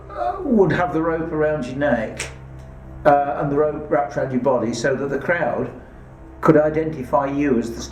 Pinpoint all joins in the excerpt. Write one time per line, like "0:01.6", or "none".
none